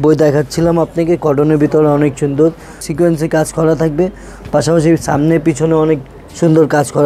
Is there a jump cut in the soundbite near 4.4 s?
no; 1 cut; at 2.9 s

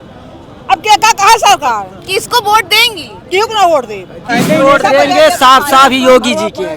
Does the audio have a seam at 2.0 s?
no; 1 cut; at 4.2 s

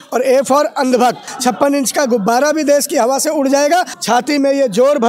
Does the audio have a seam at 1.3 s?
yes; 2 cuts; at 1.3 s, 3.9 s

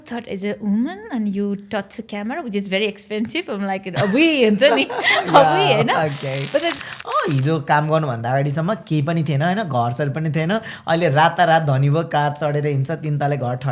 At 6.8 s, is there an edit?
yes; 1 cut; at 6.8 s

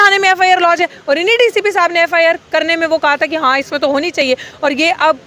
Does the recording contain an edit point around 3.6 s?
no; 0 cuts

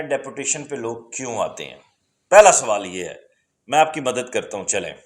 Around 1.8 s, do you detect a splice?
no; 0 cuts

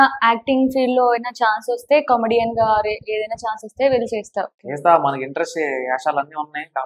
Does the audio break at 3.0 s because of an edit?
no; 1 cut; at 4.6 s

